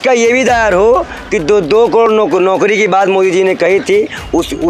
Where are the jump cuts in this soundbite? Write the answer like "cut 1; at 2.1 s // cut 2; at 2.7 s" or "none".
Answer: none